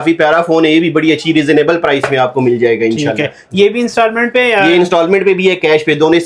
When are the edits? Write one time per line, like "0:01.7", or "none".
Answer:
none